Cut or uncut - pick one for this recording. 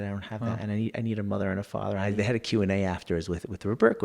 cut